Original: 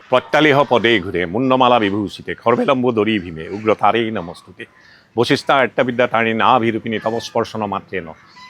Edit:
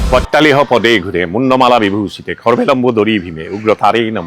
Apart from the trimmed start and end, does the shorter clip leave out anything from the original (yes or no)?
no